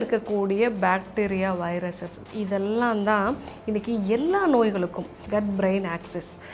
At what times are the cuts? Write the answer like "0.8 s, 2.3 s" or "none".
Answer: 5.1 s